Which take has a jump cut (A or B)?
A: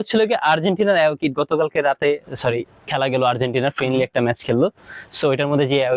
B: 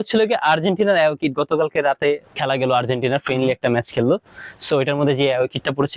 B